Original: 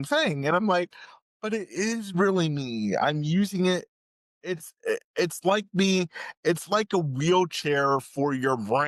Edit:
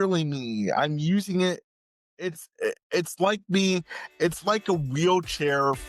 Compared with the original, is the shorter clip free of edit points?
yes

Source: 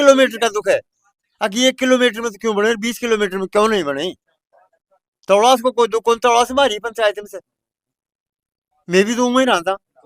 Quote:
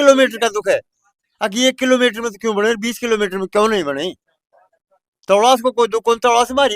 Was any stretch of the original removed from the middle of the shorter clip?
no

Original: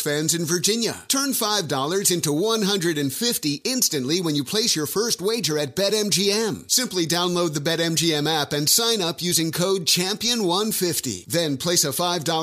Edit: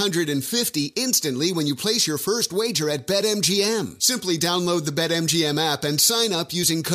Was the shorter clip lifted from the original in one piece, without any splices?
yes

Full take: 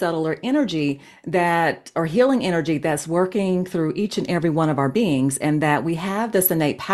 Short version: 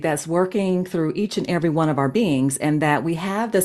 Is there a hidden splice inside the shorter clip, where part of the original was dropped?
no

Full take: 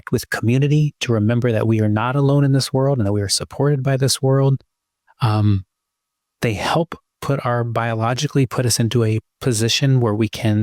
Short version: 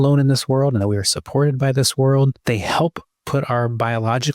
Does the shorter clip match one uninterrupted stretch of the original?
no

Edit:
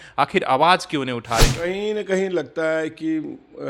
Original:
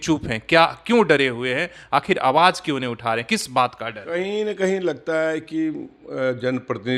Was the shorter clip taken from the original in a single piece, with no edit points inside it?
no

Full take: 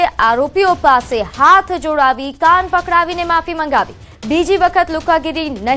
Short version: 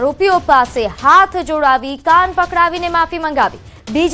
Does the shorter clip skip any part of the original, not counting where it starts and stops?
no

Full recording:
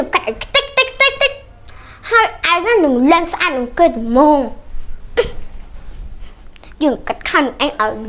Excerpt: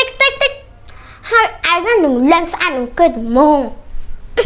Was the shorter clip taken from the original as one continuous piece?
yes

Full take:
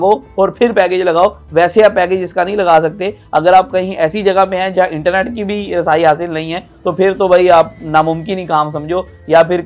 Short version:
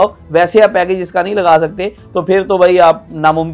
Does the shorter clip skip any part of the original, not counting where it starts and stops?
yes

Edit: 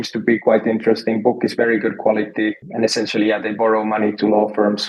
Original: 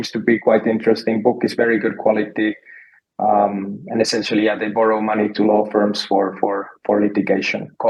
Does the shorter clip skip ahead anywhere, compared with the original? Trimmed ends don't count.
yes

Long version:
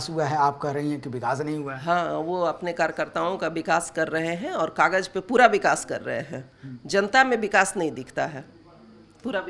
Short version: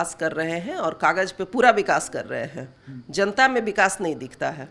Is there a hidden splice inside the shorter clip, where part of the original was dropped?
no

